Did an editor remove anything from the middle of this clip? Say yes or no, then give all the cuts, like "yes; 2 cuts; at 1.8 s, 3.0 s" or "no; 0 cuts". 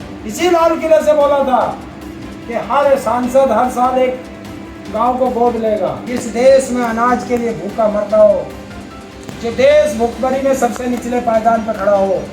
yes; 1 cut; at 6.1 s